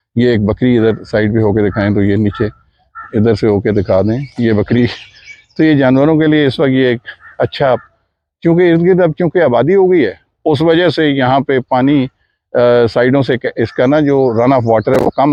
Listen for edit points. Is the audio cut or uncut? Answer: uncut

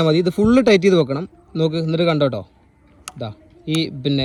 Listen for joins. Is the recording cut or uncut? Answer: uncut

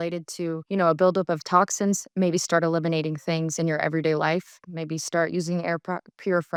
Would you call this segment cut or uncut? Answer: uncut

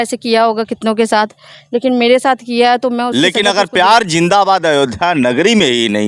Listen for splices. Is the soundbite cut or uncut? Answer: cut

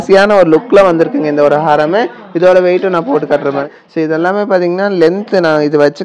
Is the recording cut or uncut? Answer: cut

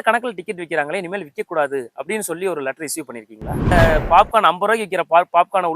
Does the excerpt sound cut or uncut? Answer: cut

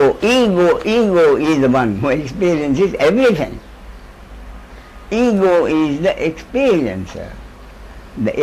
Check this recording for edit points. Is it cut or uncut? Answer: uncut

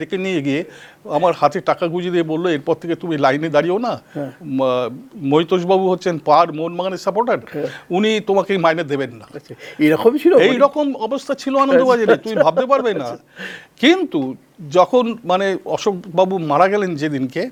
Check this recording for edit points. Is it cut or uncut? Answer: uncut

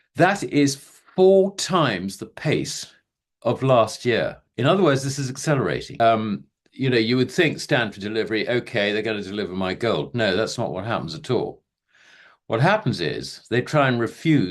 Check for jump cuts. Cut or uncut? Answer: cut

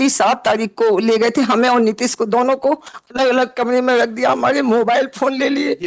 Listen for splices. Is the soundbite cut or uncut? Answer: uncut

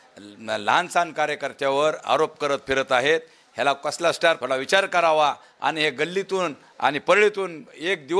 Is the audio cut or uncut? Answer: cut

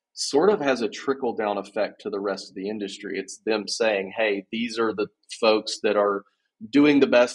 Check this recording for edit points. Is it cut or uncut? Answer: uncut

